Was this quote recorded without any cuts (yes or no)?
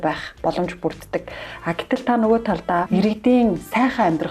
no